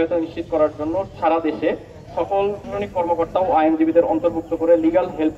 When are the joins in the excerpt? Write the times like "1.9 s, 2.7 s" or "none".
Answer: 1.1 s, 2.6 s